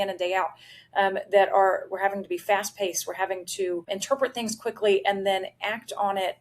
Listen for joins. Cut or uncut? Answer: cut